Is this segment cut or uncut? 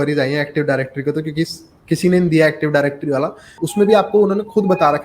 cut